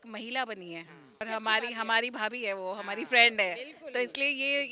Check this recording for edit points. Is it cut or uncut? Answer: cut